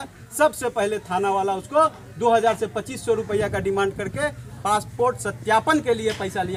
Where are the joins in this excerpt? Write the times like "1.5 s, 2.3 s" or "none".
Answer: none